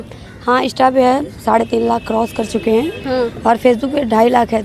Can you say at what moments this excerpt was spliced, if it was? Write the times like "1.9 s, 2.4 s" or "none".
none